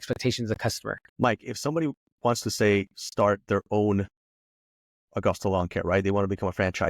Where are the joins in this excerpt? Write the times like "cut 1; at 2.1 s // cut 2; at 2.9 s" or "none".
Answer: cut 1; at 1.0 s